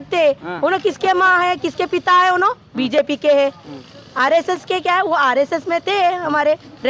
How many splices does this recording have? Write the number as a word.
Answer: zero